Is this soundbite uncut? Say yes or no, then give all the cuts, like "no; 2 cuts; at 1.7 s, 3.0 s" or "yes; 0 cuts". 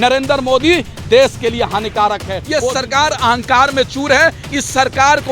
no; 1 cut; at 2.4 s